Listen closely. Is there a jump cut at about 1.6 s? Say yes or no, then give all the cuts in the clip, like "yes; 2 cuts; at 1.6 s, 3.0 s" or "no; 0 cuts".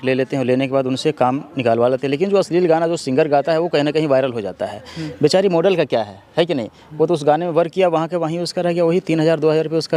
no; 0 cuts